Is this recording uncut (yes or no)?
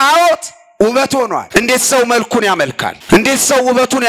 no